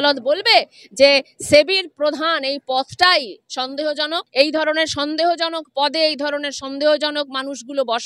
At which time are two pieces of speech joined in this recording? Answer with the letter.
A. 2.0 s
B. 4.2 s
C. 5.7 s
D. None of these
D